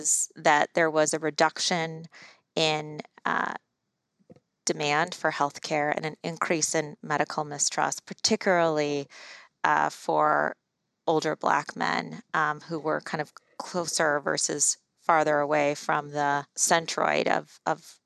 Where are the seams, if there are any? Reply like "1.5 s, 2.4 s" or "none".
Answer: 16.5 s